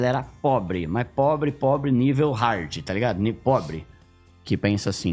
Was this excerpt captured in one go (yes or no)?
no